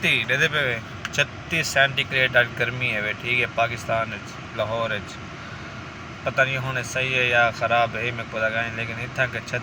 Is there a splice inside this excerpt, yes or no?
no